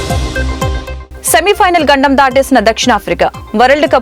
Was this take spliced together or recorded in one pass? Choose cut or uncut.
cut